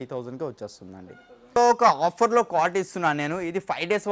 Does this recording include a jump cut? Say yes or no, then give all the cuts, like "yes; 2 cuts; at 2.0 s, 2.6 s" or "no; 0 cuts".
yes; 1 cut; at 1.6 s